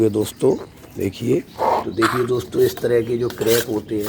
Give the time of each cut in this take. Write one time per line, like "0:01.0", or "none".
0:01.5